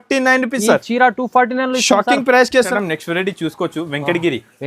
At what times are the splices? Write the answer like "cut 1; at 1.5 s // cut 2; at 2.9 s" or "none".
cut 1; at 2.7 s

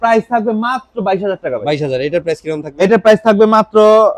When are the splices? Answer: none

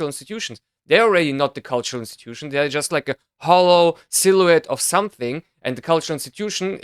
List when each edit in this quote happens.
none

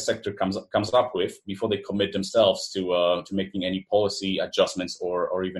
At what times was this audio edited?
none

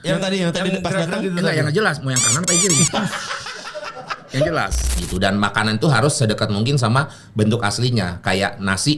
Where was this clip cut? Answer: cut 1; at 4.9 s

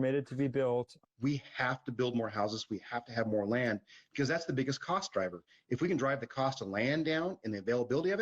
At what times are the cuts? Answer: cut 1; at 1.0 s

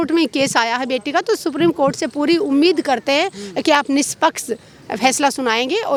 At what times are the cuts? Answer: none

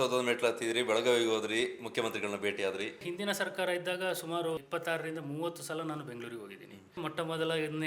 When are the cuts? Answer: cut 1; at 3.0 s // cut 2; at 4.6 s // cut 3; at 7.0 s

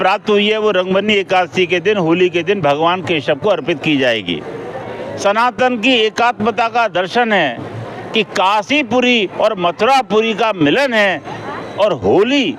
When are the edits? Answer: cut 1; at 4.9 s

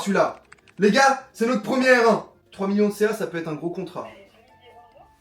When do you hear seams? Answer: cut 1; at 2.4 s

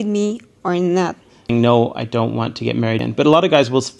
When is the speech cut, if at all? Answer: cut 1; at 1.5 s // cut 2; at 3.0 s

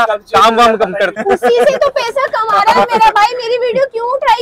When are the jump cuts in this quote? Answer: cut 1; at 1.1 s

